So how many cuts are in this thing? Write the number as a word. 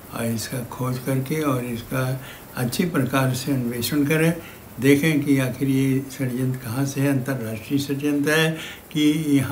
zero